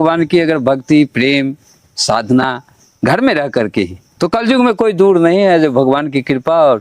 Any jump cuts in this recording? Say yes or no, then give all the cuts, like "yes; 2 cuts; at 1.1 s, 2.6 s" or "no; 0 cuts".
yes; 1 cut; at 4.0 s